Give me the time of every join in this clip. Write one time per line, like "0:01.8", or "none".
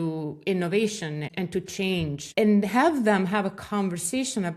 0:01.3
0:02.2